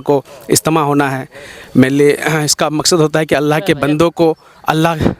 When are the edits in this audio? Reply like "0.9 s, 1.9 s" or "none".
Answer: none